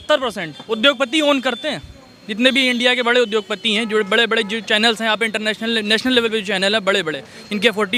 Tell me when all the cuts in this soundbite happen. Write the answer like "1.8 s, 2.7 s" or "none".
none